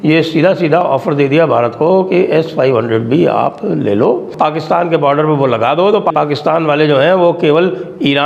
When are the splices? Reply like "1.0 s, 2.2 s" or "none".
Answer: 4.3 s, 6.1 s